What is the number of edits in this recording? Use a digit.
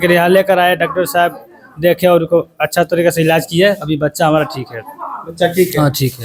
0